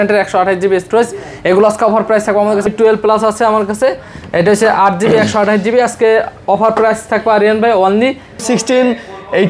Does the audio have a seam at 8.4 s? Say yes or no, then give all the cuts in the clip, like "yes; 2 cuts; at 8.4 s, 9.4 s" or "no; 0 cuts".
yes; 2 cuts; at 2.7 s, 8.4 s